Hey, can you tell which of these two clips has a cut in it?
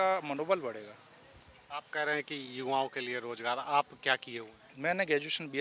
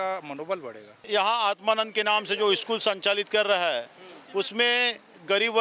second; 1 cut; at 1.1 s

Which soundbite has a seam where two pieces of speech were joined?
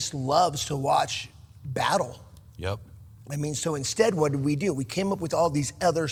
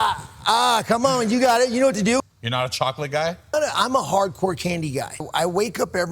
second; 3 cuts; at 2.2 s, 3.5 s, 5.2 s

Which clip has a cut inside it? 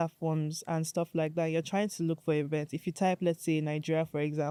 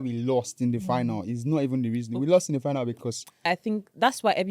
second; 1 cut; at 3.5 s

